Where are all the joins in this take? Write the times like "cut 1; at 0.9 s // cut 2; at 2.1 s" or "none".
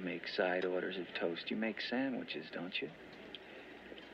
cut 1; at 3.1 s